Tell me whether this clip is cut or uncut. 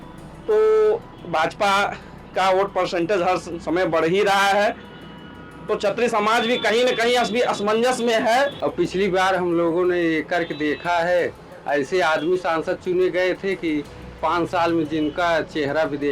cut